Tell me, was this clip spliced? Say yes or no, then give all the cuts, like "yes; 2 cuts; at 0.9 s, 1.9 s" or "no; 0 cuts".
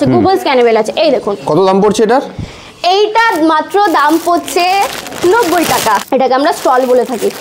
yes; 1 cut; at 6.0 s